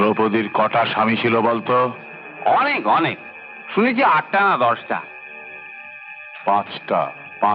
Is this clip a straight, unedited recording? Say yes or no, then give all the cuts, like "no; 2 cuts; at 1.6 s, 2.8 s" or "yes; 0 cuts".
yes; 0 cuts